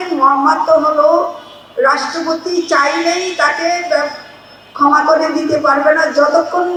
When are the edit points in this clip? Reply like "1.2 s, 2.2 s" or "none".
none